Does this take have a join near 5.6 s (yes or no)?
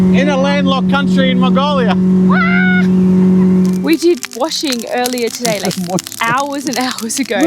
no